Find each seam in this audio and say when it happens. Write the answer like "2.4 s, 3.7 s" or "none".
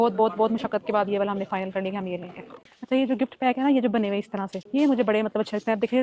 none